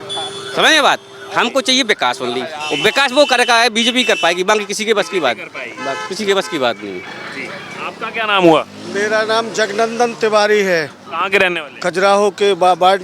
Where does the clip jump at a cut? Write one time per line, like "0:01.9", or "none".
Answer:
none